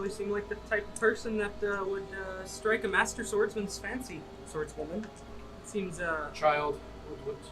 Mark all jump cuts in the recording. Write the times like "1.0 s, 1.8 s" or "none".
5.3 s